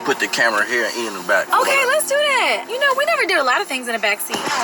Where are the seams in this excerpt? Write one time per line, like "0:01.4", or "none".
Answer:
0:01.5